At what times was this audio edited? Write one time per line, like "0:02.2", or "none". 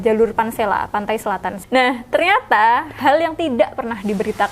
0:01.5

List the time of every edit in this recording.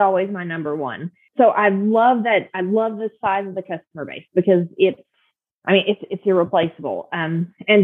0:01.2

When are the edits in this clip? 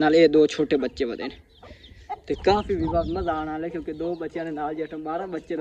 none

